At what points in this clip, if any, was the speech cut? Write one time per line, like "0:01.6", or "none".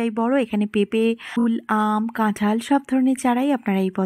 0:01.4